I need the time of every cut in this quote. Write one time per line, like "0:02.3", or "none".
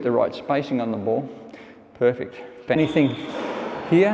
0:02.8